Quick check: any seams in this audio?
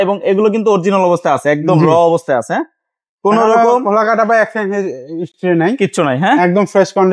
no; 0 cuts

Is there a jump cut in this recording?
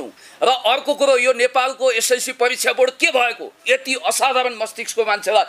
no; 0 cuts

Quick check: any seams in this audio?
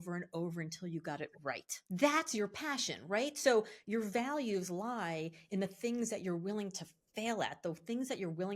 yes; 1 cut; at 1.5 s

